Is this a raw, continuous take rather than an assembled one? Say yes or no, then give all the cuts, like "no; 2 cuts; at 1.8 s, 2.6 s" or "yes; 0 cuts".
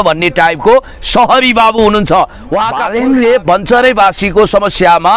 no; 1 cut; at 2.8 s